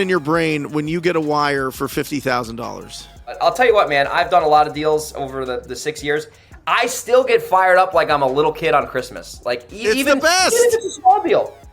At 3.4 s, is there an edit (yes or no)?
yes